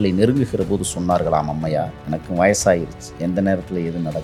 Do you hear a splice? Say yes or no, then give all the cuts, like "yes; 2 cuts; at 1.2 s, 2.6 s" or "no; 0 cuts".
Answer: no; 0 cuts